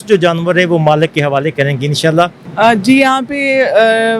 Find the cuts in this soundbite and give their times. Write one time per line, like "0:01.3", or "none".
0:02.4